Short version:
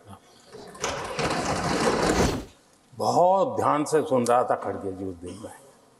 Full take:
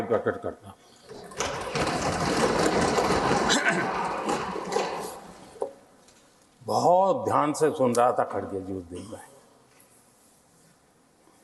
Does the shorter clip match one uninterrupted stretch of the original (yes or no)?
no